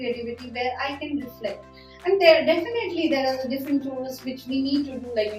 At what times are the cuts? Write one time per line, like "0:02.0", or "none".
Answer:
none